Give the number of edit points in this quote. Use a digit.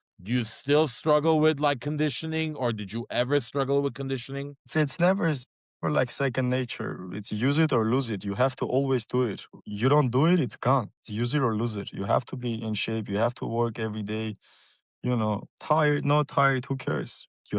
0